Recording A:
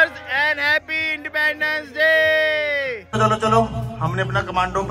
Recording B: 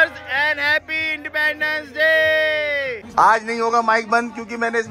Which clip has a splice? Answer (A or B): B